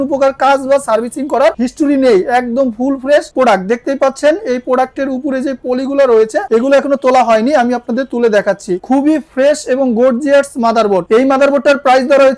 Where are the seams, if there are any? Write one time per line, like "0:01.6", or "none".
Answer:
none